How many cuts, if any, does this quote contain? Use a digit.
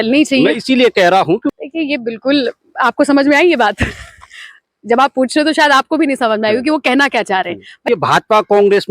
2